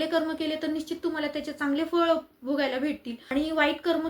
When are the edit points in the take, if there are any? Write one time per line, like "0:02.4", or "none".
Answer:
0:03.1